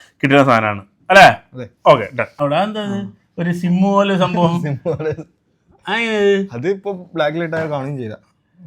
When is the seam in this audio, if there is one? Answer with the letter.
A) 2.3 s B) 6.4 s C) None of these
A